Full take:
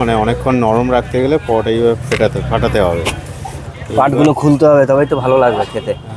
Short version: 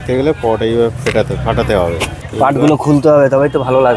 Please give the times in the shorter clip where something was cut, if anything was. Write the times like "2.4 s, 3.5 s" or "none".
2.2 s